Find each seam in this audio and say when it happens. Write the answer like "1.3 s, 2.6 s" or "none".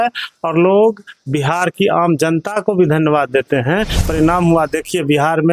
4.0 s